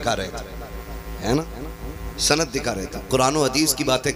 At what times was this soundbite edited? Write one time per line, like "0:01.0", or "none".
none